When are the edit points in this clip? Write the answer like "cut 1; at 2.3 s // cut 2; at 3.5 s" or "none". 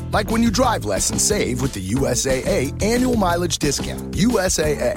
none

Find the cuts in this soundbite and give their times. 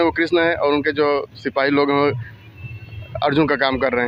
none

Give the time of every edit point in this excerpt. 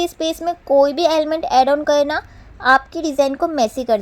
none

